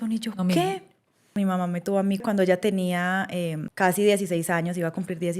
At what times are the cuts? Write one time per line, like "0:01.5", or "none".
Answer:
0:01.3
0:02.2
0:03.6